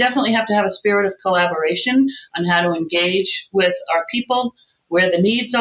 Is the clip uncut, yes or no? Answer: no